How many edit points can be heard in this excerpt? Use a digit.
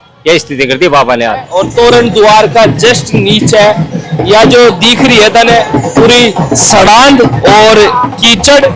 1